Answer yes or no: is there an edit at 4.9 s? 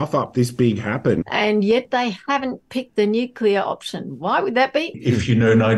yes